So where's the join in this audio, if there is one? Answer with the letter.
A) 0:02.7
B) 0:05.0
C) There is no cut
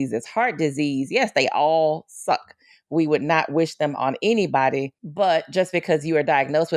B